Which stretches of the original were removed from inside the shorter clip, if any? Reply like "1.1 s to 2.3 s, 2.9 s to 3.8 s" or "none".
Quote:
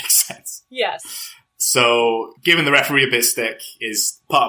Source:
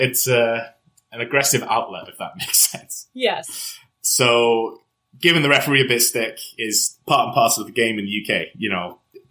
4.8 s to 5.1 s